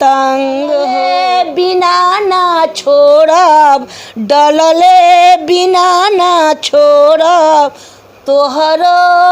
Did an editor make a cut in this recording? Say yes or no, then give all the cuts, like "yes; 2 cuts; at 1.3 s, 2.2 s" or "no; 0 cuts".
yes; 1 cut; at 0.9 s